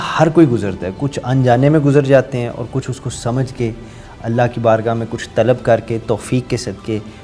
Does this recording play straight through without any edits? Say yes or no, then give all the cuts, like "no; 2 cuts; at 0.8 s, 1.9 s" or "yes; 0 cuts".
yes; 0 cuts